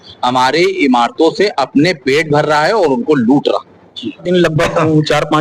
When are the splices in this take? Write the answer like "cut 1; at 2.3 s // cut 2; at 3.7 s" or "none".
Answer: cut 1; at 4.2 s

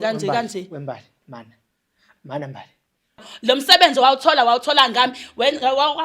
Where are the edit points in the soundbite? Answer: cut 1; at 3.3 s

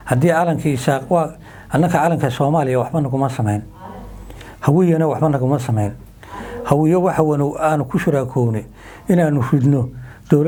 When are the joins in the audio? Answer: none

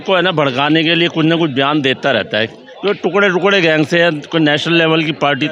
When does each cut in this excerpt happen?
none

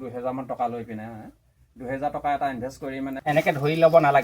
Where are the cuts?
cut 1; at 3.1 s

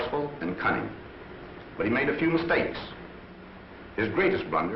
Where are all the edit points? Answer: cut 1; at 3.8 s

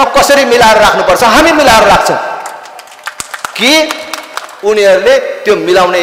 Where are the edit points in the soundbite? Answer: none

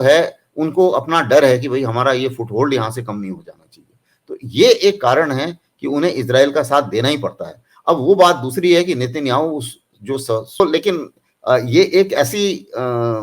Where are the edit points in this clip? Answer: cut 1; at 10.6 s

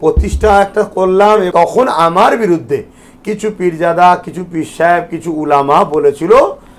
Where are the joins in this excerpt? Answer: cut 1; at 1.5 s

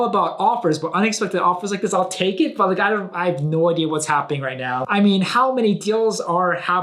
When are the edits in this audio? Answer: cut 1; at 4.8 s

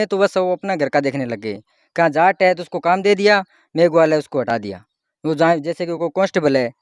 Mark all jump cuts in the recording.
none

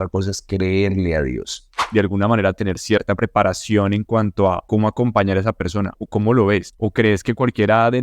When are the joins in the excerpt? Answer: cut 1; at 1.8 s // cut 2; at 4.6 s // cut 3; at 6.0 s // cut 4; at 6.7 s

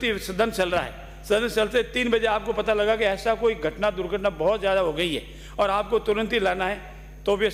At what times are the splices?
none

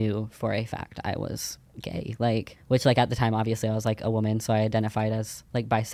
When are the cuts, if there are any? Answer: cut 1; at 2.5 s

